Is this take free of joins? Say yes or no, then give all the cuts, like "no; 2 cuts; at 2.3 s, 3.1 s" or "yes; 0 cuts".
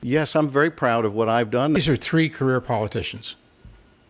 no; 1 cut; at 1.8 s